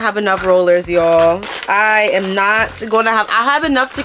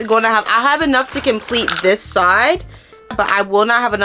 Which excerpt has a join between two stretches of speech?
second; 1 cut; at 3.1 s

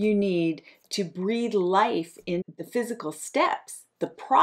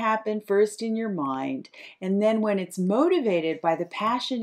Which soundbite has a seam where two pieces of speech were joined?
first; 1 cut; at 2.5 s

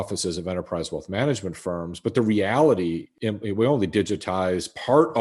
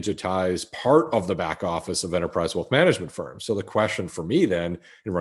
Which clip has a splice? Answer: first; 1 cut; at 3.1 s

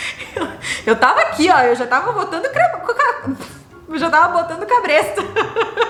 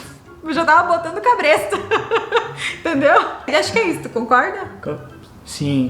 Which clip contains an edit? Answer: second; 1 cut; at 3.5 s

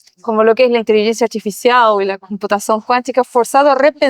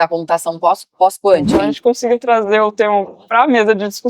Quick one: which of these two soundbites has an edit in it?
second; 1 cut; at 1.6 s

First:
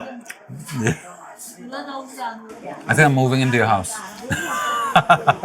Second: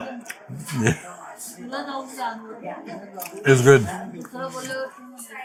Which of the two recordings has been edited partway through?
first; 1 cut; at 2.8 s

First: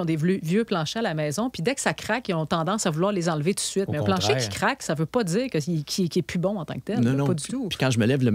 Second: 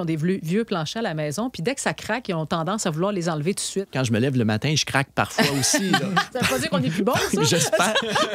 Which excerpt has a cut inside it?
second; 1 cut; at 3.9 s

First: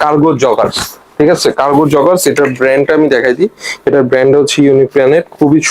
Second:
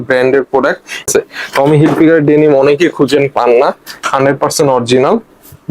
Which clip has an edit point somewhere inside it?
second; 1 cut; at 1.1 s

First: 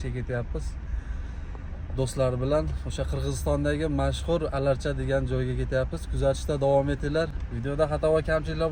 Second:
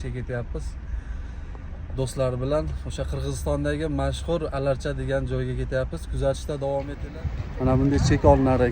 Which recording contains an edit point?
second; 1 cut; at 7.0 s

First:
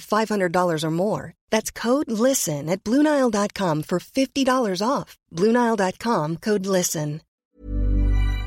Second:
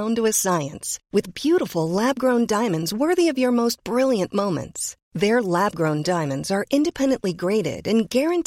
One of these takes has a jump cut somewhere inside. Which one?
first; 1 cut; at 7.5 s

